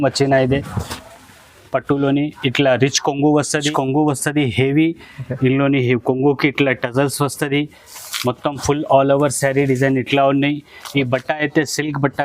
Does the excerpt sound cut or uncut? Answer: cut